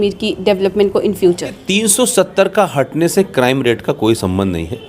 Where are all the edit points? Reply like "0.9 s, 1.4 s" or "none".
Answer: 1.6 s